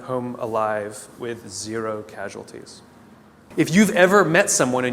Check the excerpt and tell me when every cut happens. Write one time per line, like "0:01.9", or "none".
0:03.4